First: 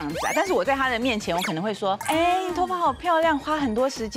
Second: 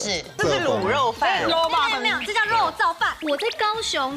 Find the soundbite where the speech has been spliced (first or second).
first